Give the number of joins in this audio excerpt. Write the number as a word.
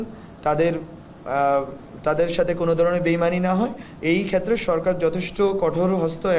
zero